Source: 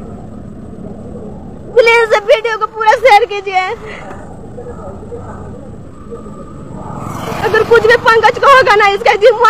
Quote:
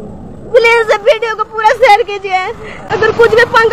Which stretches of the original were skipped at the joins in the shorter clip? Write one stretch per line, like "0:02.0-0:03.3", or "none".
0:03.9-0:07.2